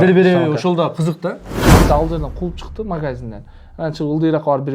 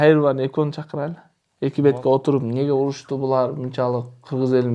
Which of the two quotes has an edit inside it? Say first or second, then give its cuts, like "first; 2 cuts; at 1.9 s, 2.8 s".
first; 1 cut; at 1.5 s